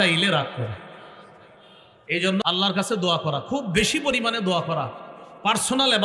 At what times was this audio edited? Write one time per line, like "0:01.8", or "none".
0:02.4